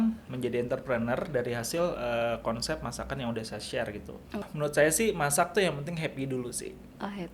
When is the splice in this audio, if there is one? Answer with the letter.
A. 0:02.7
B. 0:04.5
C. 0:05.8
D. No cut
B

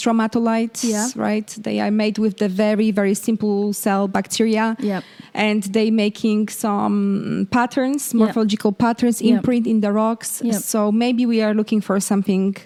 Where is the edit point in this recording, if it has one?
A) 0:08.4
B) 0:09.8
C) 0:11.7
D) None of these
D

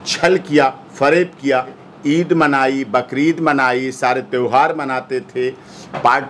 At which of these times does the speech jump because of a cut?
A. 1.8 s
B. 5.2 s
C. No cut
A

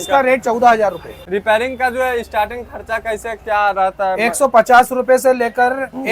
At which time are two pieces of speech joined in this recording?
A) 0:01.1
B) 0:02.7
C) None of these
A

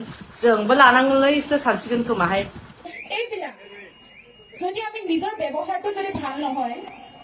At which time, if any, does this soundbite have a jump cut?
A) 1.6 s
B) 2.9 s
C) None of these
B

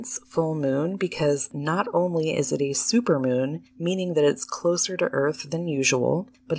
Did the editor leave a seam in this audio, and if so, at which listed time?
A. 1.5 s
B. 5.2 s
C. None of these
A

